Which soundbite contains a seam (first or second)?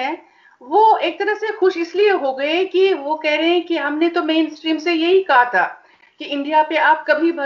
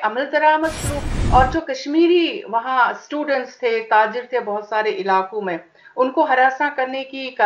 second